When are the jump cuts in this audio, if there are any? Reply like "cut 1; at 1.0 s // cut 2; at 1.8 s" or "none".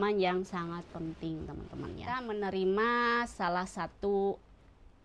cut 1; at 2.2 s